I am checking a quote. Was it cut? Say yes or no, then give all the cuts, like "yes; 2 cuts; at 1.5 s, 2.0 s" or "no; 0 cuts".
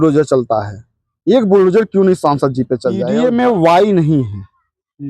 yes; 1 cut; at 3.0 s